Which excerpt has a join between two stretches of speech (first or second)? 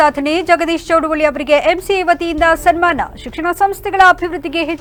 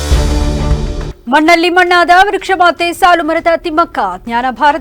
second